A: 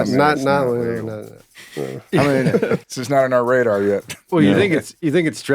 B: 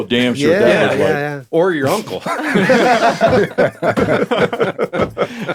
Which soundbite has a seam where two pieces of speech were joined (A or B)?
A